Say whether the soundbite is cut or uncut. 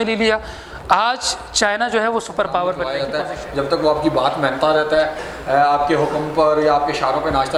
cut